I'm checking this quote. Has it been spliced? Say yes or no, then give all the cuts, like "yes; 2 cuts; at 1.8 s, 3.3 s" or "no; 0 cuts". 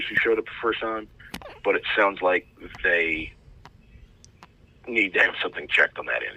no; 0 cuts